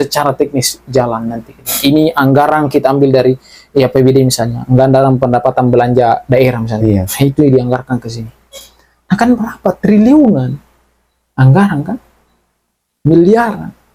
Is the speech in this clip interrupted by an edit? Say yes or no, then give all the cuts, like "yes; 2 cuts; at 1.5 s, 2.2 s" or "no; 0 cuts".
no; 0 cuts